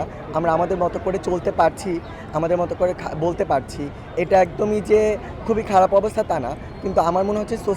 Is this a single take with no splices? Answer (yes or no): yes